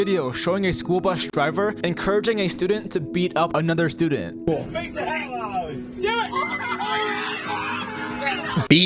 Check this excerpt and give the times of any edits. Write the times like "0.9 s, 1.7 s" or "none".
1.1 s